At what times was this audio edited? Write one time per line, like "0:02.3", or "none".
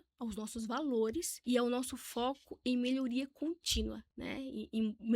0:01.3
0:04.1